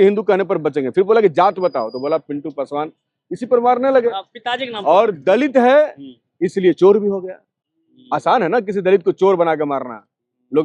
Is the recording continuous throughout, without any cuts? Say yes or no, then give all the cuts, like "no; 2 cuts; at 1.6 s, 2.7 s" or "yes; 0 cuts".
yes; 0 cuts